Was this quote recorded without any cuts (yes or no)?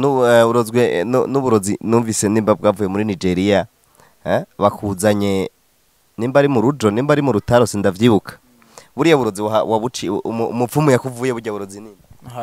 yes